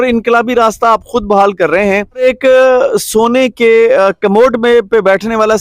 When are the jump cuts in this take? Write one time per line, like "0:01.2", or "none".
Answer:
0:02.2

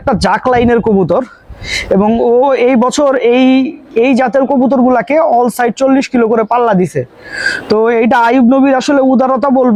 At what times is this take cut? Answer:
none

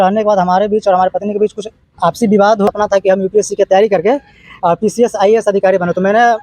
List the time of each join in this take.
0:02.7

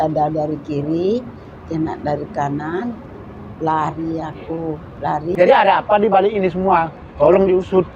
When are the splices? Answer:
0:05.4

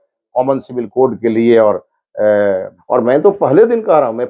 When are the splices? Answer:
0:02.7

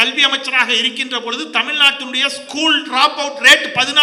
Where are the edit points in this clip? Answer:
none

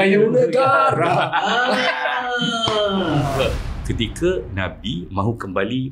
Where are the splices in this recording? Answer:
0:03.7

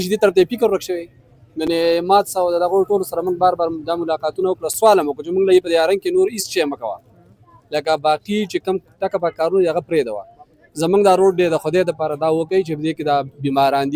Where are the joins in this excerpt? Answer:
none

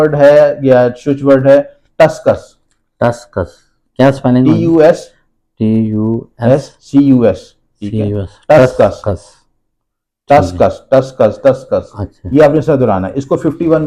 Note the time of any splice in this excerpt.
none

